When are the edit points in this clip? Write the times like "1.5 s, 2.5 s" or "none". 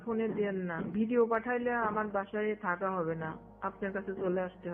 0.9 s